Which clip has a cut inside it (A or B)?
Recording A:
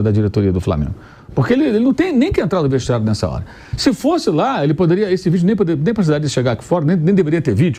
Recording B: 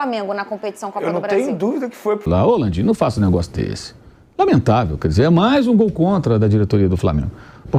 B